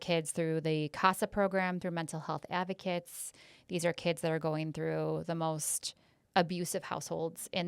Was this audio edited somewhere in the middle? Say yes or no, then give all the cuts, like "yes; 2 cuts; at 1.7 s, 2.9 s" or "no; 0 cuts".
no; 0 cuts